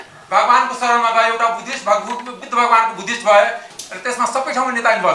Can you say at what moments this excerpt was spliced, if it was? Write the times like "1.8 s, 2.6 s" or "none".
3.7 s